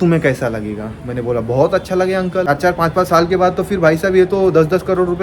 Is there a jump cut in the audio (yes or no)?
yes